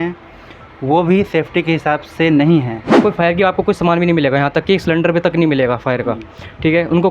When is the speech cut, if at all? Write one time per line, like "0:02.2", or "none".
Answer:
0:03.0